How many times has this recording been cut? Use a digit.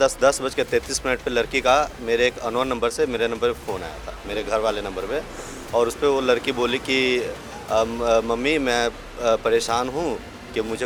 0